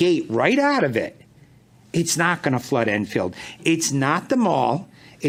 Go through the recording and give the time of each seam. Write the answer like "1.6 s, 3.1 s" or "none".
none